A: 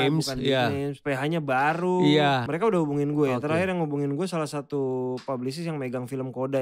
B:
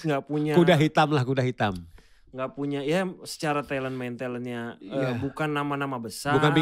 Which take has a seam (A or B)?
A